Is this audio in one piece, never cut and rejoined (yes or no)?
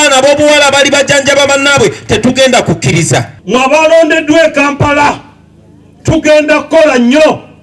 no